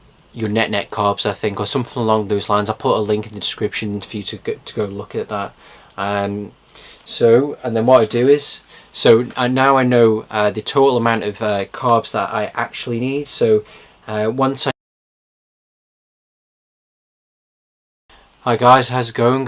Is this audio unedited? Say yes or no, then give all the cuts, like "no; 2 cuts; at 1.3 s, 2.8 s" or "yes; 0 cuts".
yes; 0 cuts